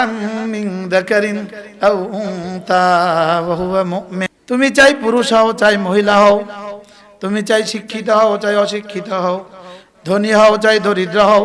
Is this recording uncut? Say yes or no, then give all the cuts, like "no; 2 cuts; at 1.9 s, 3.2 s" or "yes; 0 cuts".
no; 1 cut; at 4.3 s